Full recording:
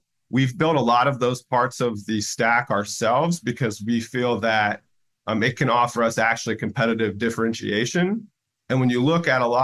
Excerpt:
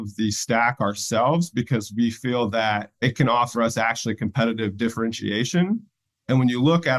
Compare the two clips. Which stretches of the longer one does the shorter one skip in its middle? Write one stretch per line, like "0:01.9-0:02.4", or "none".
0:04.9-0:05.4

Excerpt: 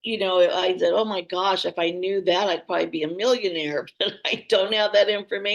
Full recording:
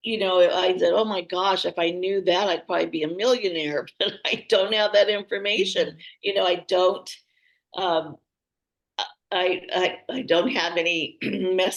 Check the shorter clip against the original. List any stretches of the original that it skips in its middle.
none

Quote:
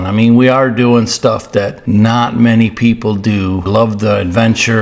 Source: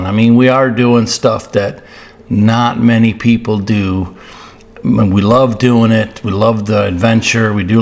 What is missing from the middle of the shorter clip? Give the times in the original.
0:01.8-0:02.2
0:04.1-0:06.3

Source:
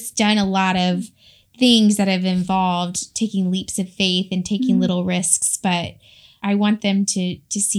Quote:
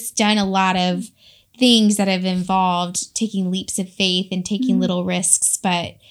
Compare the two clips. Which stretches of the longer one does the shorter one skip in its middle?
none

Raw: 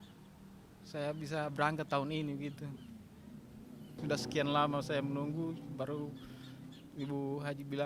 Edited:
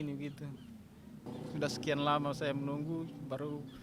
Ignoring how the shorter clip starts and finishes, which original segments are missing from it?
0:03.6-0:03.9

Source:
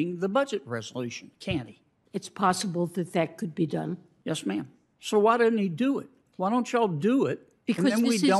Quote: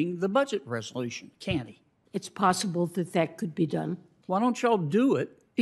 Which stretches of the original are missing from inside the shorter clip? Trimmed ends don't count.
0:04.1-0:06.2

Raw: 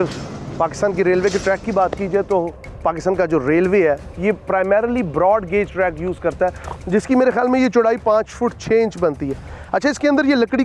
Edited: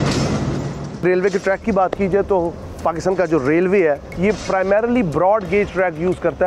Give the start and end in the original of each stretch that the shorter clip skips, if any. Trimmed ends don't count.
none

